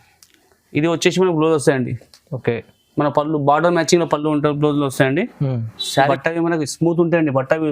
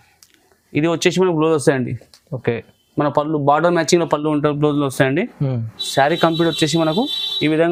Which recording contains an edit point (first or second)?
first